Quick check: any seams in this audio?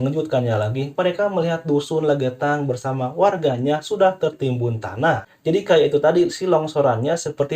yes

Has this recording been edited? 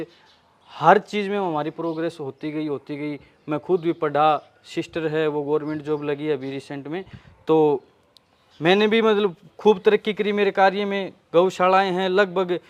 no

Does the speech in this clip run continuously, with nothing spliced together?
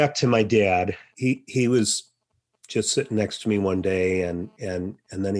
no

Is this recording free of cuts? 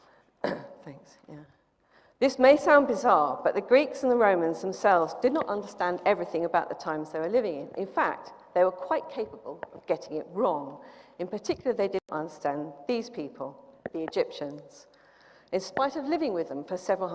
no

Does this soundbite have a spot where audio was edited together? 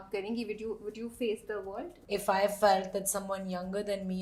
yes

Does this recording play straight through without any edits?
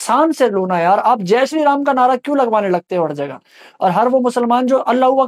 yes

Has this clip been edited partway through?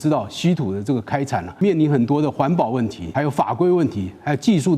yes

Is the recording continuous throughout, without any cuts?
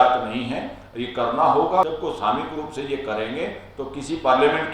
no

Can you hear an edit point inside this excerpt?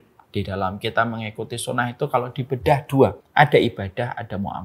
yes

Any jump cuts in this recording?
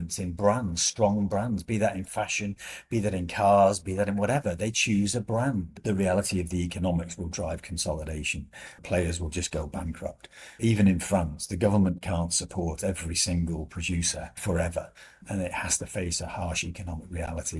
yes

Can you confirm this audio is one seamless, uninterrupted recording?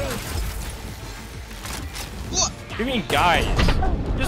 no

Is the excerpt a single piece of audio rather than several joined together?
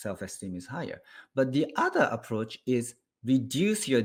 yes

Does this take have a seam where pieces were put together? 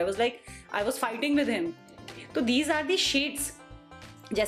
no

